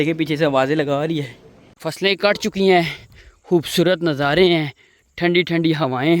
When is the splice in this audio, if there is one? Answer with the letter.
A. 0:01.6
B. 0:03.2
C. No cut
A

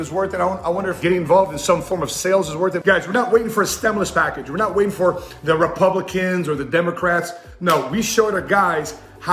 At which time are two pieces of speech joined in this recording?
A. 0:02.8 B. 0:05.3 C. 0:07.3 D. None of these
A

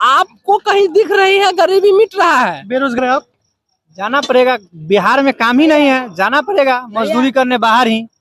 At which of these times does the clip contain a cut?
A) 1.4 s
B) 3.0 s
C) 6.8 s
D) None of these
B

